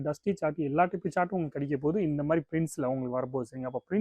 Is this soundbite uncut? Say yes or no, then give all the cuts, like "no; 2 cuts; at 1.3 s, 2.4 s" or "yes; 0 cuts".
yes; 0 cuts